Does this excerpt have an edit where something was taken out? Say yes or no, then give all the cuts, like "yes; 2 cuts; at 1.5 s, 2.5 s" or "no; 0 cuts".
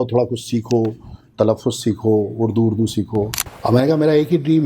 yes; 1 cut; at 3.4 s